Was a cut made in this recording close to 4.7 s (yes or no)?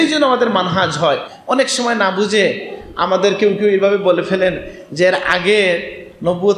no